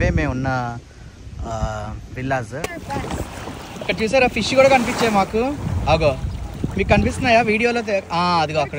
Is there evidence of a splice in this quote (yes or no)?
yes